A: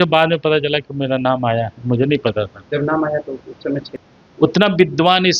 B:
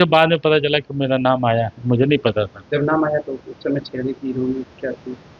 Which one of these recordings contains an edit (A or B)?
A